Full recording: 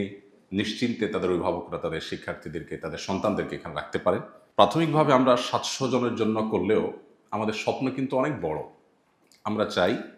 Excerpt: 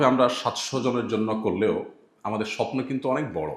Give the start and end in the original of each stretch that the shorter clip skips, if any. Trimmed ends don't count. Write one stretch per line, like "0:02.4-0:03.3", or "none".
none